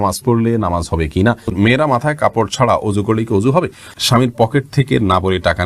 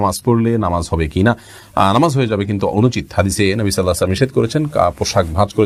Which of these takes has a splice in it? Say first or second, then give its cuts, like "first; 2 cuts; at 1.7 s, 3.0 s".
first; 2 cuts; at 1.5 s, 3.9 s